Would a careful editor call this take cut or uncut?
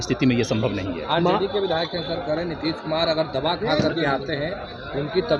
uncut